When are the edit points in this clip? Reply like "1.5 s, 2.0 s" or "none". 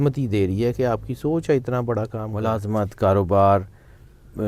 2.4 s